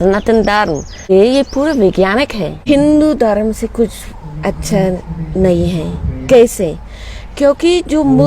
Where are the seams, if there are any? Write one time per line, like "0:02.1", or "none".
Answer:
0:01.1
0:02.5